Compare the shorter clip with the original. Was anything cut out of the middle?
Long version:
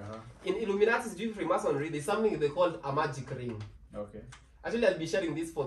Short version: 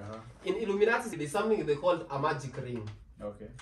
yes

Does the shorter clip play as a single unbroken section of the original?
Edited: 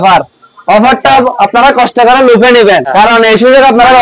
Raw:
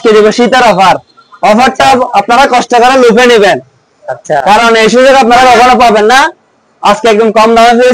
no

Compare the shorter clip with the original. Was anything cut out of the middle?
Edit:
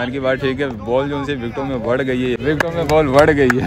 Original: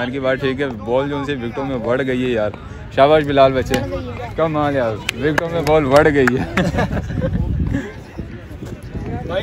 yes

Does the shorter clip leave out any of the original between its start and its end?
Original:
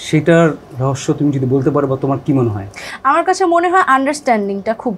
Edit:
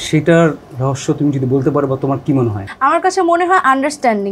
yes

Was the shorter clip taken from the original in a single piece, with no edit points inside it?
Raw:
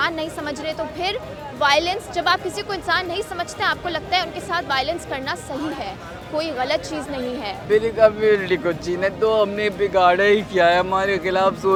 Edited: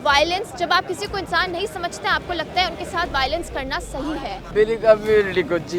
no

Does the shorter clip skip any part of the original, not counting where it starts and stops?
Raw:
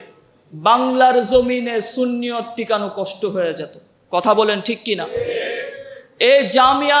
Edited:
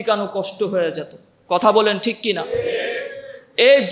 no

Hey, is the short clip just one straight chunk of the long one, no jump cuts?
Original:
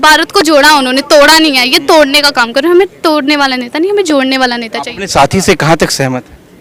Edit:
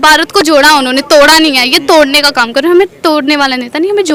yes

